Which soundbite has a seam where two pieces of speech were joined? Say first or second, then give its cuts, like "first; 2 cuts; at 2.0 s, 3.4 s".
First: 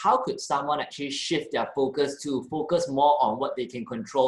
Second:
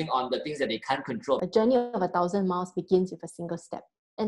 second; 1 cut; at 1.4 s